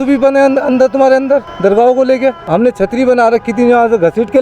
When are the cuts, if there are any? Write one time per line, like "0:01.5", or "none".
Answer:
0:01.5
0:02.4